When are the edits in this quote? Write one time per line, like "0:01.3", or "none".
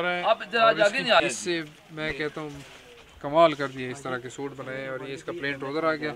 0:01.2